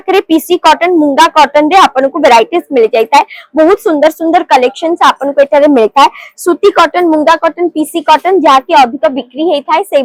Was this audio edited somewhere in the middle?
no; 0 cuts

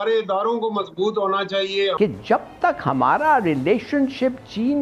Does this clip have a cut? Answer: yes; 1 cut; at 1.9 s

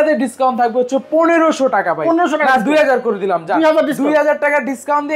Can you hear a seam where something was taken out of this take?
no; 0 cuts

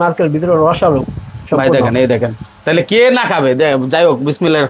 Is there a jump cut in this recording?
no; 0 cuts

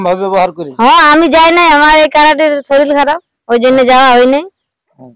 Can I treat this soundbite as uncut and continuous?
yes; 0 cuts

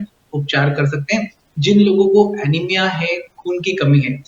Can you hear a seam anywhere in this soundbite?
no; 0 cuts

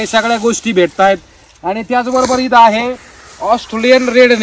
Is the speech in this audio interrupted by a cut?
no; 0 cuts

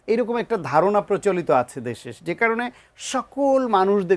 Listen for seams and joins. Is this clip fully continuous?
yes; 0 cuts

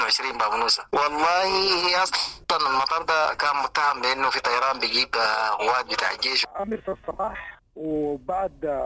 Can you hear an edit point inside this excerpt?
yes; 1 cut; at 6.4 s

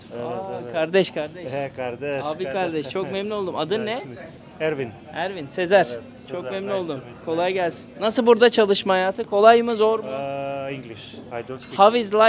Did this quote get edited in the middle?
no; 0 cuts

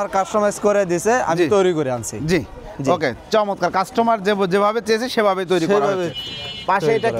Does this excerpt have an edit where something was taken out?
no; 0 cuts

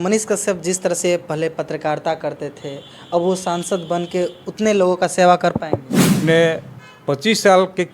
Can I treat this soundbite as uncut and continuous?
no; 1 cut; at 6.2 s

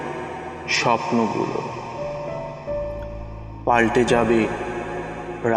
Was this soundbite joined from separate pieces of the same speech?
no; 0 cuts

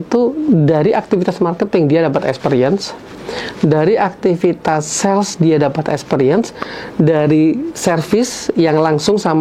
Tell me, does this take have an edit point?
no; 0 cuts

